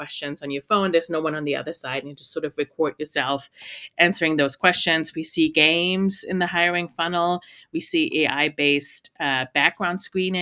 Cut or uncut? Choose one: uncut